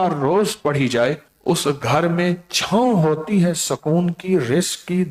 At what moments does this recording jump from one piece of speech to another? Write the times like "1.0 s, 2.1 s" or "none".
1.3 s

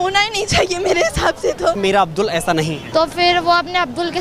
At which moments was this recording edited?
1.8 s, 2.8 s

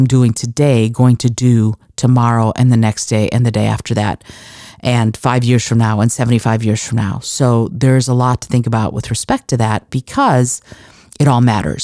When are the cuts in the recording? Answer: none

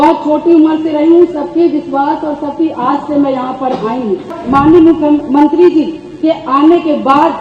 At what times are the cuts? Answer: 4.4 s

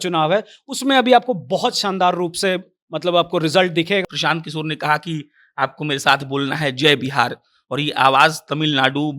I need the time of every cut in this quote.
4.0 s

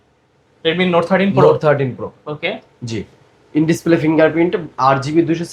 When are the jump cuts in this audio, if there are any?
none

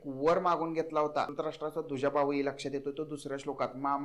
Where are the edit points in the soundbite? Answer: 1.3 s

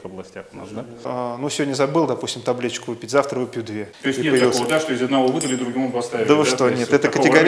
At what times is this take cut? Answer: 1.1 s, 3.9 s

